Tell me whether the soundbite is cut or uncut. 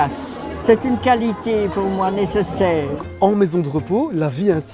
cut